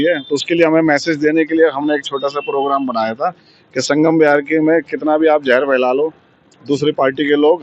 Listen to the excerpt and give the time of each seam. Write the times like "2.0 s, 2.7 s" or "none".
none